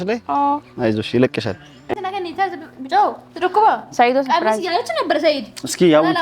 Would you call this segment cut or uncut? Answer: cut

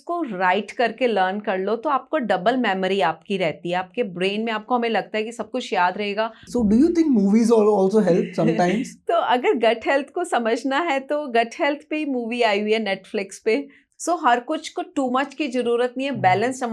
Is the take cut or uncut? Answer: cut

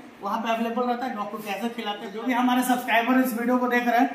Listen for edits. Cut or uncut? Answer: cut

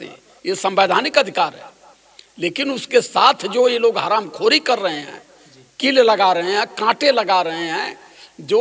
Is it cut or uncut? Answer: uncut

